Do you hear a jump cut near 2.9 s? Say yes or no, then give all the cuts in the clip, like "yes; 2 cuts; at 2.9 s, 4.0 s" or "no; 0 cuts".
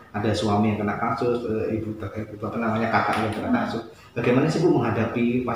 no; 0 cuts